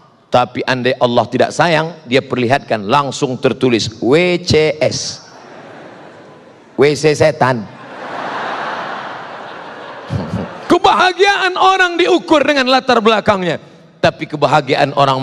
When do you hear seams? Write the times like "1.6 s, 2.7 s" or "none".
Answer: 10.6 s

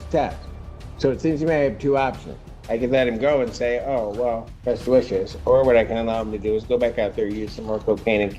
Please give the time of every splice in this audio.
4.5 s

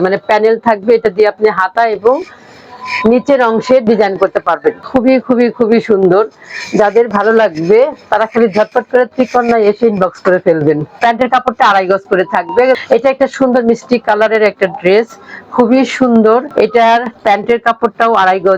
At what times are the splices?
4.8 s, 11.0 s, 12.8 s, 16.5 s

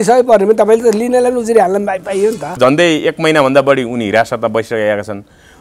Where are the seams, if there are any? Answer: 2.6 s

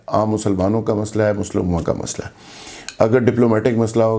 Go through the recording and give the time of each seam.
none

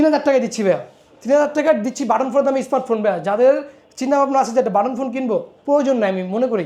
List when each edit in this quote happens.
none

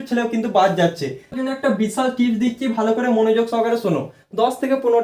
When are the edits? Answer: 1.3 s

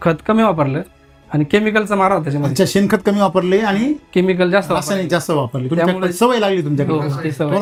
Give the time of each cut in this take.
none

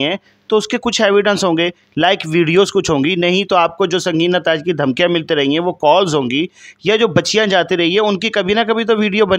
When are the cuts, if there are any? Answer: none

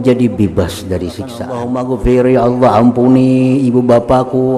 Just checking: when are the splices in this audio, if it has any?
1.5 s

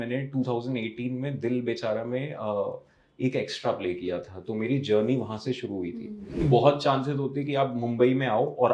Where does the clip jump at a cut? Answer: 6.4 s

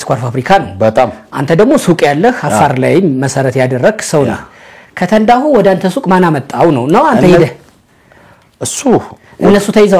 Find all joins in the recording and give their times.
none

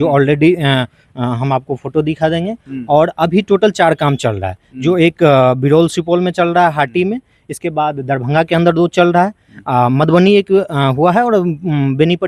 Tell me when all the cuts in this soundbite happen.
none

